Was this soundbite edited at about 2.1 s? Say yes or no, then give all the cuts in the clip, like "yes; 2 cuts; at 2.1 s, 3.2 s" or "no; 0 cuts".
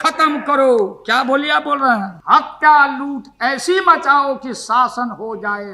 yes; 1 cut; at 2.1 s